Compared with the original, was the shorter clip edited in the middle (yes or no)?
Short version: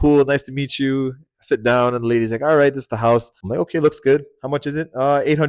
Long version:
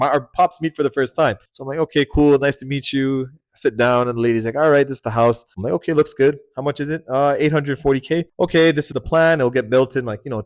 no